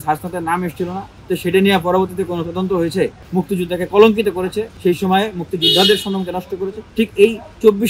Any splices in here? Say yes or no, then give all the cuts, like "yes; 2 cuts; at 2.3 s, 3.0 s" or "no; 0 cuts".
yes; 4 cuts; at 1.1 s, 3.2 s, 4.7 s, 6.8 s